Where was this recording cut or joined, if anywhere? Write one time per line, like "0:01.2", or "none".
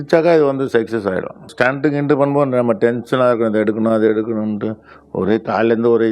0:01.5